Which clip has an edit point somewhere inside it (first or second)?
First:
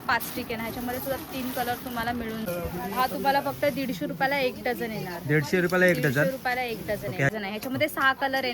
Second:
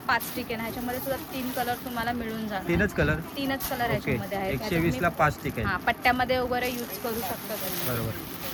first